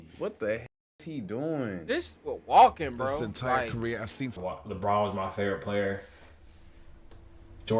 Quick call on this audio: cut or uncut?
cut